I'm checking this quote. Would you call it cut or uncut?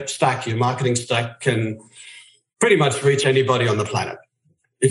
uncut